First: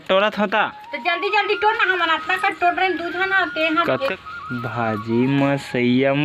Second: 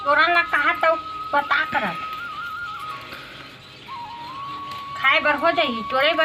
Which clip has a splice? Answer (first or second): first